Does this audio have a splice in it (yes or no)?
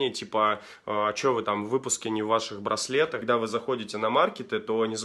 yes